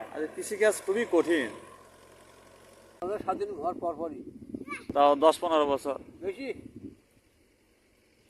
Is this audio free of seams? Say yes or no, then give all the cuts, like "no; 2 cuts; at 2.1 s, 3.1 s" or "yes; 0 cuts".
no; 2 cuts; at 3.0 s, 4.8 s